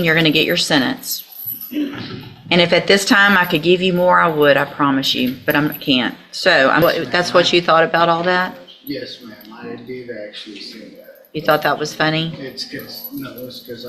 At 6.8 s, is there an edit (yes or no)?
yes